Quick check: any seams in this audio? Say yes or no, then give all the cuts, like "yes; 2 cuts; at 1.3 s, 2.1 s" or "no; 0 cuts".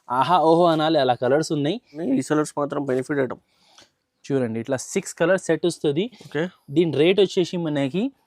yes; 1 cut; at 2.0 s